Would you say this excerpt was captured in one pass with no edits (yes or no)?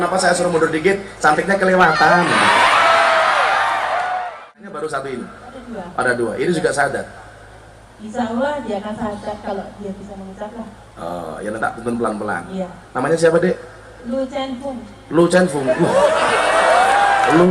no